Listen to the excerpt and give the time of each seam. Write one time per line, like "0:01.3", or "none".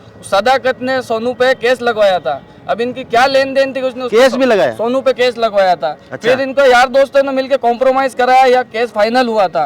none